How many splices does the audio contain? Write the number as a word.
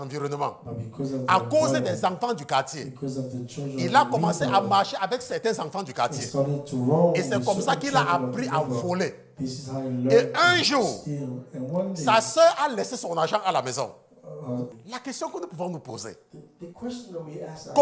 one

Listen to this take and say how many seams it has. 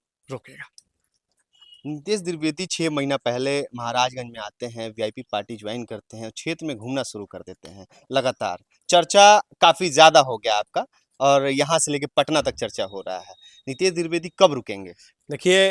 zero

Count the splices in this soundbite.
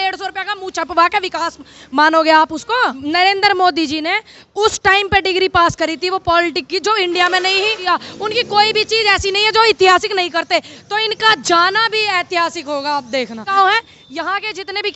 three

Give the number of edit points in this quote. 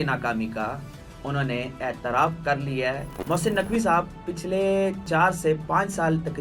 two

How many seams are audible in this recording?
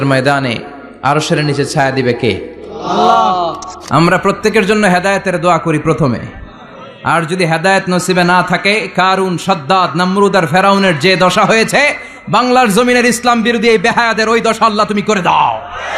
one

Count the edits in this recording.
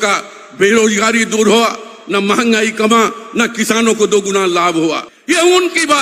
one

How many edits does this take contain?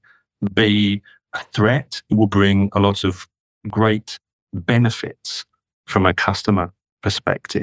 one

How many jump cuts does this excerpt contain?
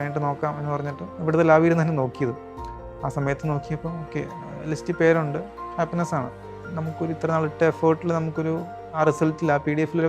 three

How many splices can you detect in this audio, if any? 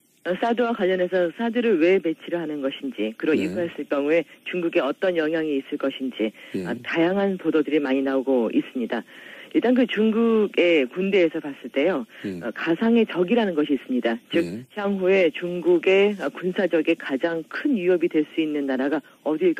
zero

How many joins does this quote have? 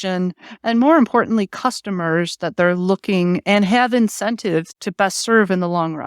one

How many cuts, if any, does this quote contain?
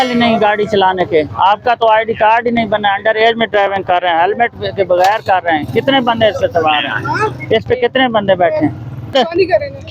zero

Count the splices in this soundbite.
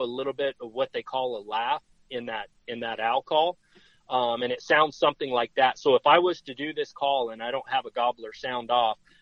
zero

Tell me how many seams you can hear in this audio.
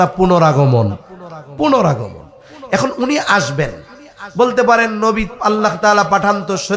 zero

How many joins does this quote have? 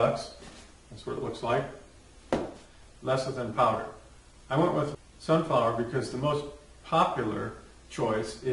zero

